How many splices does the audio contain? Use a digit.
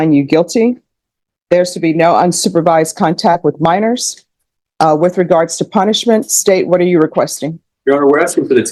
0